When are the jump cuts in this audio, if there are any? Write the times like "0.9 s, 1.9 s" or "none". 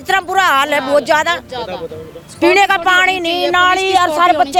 none